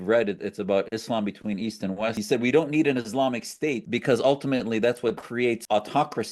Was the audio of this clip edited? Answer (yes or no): yes